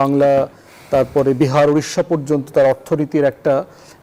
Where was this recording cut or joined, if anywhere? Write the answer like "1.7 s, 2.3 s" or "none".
none